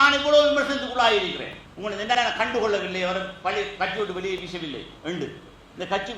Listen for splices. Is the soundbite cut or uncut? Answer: cut